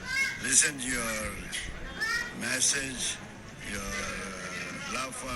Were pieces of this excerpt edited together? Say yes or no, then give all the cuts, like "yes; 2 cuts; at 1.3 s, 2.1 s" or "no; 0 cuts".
no; 0 cuts